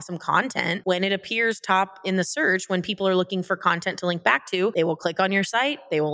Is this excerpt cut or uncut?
cut